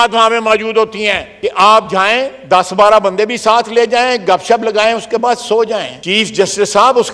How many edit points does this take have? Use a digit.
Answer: 2